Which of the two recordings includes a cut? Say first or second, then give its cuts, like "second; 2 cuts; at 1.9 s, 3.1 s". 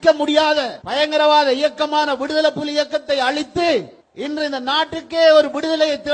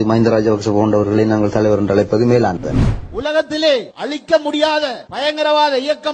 second; 1 cut; at 3.0 s